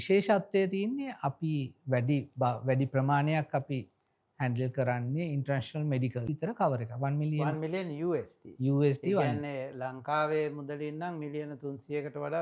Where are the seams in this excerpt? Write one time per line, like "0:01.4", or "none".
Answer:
0:06.3